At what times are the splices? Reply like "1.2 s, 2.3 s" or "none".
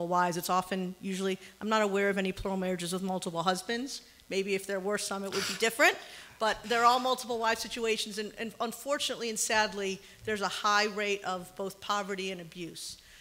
none